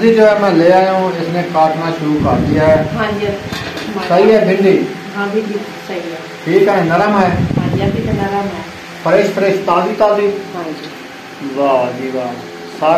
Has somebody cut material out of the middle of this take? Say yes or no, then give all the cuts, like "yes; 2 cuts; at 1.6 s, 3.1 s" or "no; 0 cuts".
no; 0 cuts